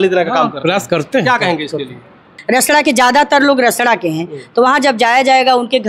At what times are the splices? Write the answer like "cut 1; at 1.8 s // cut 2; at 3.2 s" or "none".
cut 1; at 2.3 s